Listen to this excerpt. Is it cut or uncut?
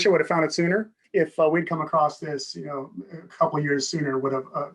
cut